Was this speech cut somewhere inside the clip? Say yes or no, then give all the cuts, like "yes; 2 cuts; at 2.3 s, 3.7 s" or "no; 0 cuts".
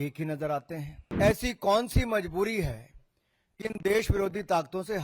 yes; 1 cut; at 1.0 s